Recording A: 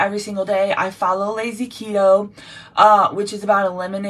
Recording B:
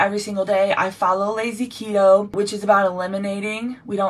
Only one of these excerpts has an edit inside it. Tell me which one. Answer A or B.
B